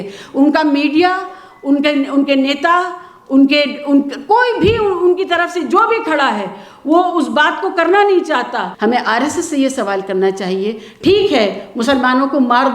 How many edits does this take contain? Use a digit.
1